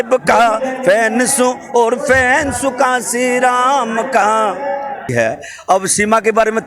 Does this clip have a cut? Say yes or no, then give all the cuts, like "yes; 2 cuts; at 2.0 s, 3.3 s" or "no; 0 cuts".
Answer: yes; 1 cut; at 5.1 s